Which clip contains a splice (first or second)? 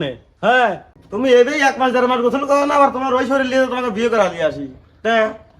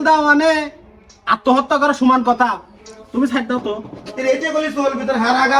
first